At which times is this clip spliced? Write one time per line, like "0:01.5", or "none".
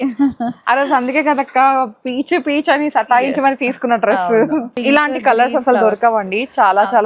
0:04.7